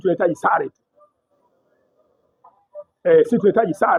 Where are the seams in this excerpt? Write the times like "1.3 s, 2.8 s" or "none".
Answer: none